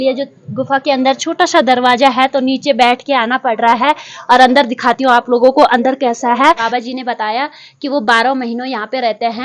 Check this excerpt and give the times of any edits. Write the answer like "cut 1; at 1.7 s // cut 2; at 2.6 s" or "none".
cut 1; at 6.6 s